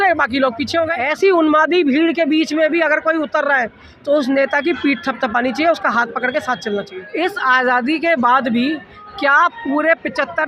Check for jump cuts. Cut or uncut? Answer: cut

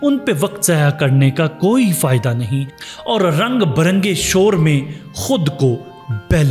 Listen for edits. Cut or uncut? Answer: cut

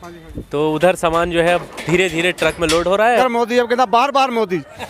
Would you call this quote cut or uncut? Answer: cut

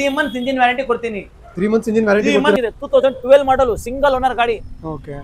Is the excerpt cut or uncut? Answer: cut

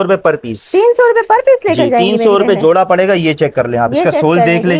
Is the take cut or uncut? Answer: uncut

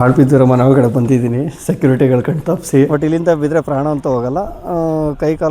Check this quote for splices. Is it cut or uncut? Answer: cut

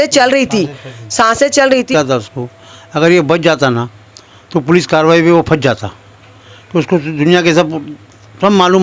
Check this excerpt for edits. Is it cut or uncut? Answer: cut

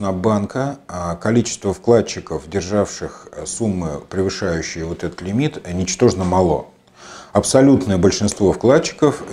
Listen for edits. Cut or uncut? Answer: uncut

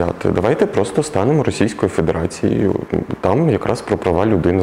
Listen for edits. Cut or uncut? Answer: uncut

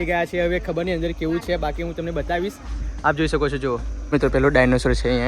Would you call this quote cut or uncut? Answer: cut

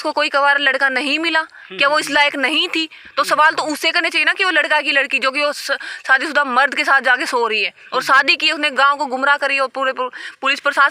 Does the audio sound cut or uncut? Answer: uncut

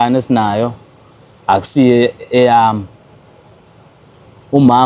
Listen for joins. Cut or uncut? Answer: uncut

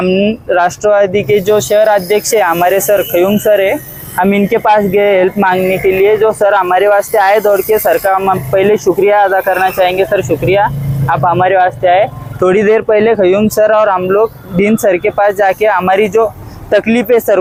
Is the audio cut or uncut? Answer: uncut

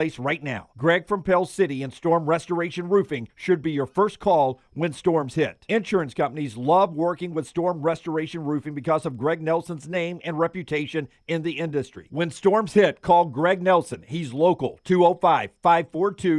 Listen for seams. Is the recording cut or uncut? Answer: uncut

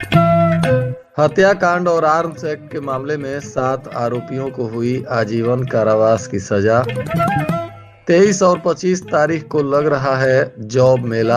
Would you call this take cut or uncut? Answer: cut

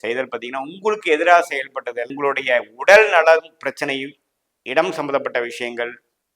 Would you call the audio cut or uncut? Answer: cut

